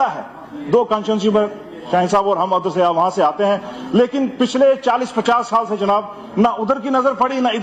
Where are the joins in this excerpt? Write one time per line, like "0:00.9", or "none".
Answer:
none